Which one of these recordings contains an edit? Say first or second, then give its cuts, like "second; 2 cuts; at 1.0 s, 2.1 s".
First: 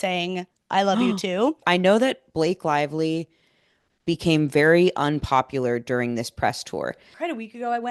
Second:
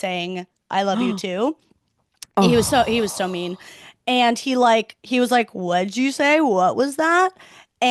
first; 2 cuts; at 1.6 s, 7.1 s